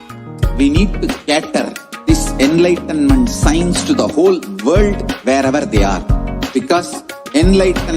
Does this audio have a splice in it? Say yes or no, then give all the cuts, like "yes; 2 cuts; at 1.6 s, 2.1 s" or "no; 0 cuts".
no; 0 cuts